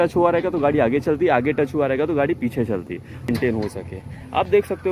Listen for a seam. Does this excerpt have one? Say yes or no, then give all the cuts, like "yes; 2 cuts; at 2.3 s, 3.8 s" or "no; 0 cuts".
yes; 1 cut; at 3.3 s